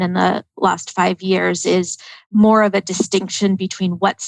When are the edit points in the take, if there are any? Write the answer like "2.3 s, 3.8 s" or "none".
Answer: 2.1 s